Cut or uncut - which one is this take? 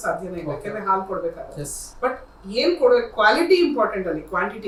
uncut